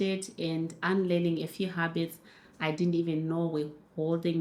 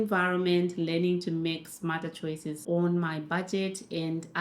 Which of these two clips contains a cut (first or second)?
second